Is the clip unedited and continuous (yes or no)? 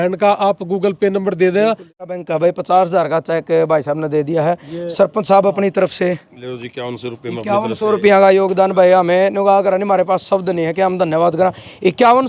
no